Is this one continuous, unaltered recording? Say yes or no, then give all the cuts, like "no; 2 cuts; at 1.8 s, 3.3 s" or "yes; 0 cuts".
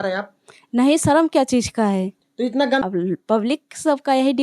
no; 1 cut; at 2.8 s